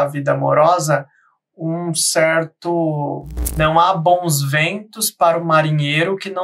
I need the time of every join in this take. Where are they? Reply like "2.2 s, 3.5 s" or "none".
3.7 s